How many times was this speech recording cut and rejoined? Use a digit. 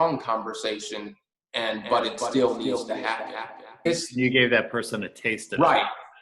1